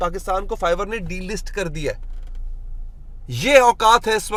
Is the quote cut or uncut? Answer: uncut